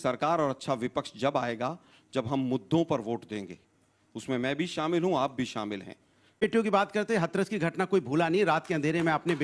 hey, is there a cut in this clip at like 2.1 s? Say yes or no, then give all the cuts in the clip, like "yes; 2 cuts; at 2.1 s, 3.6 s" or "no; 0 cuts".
no; 1 cut; at 6.4 s